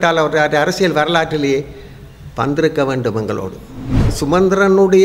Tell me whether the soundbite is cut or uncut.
cut